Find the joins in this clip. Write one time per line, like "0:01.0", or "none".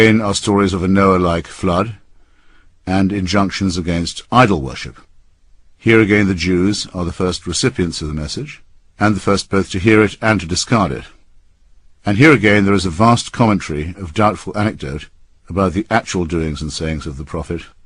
0:01.4